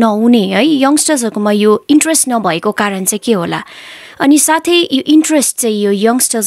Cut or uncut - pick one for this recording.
uncut